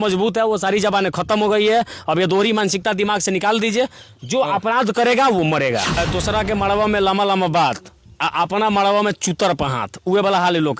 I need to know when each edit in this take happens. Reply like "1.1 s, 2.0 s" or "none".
5.9 s